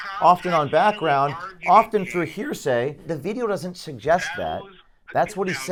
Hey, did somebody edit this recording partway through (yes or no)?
no